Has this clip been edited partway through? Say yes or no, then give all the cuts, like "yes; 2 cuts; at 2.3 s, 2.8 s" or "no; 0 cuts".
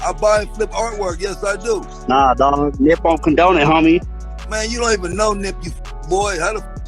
yes; 1 cut; at 1.9 s